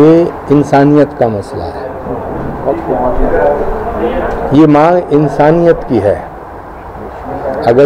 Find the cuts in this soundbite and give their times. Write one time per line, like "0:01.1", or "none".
none